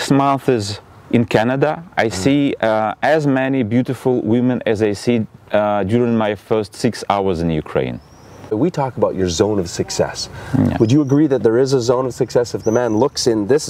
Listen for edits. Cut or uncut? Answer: cut